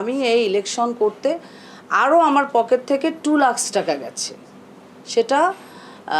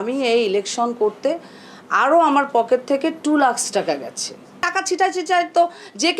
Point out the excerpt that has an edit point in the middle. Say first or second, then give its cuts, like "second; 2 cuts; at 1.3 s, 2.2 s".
second; 1 cut; at 4.6 s